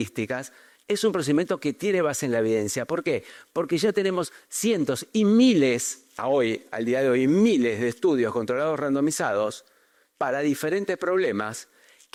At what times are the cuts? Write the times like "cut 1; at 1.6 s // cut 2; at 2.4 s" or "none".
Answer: none